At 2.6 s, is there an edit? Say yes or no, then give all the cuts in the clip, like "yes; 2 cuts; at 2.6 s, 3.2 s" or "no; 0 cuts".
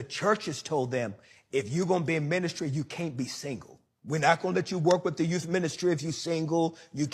no; 2 cuts; at 4.2 s, 5.4 s